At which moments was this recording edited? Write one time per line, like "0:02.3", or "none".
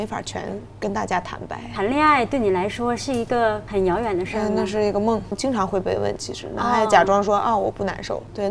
0:01.6
0:03.6
0:05.4